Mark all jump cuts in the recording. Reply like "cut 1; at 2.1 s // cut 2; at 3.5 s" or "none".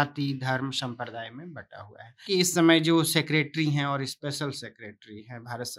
cut 1; at 2.2 s